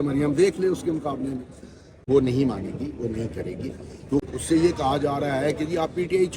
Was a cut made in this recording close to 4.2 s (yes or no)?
yes